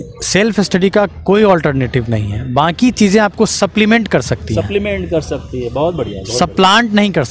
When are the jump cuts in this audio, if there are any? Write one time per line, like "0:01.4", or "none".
none